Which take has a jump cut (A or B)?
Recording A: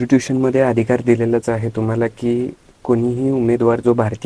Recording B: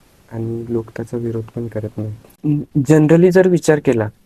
B